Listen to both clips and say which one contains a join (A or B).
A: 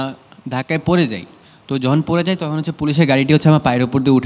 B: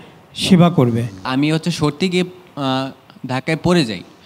B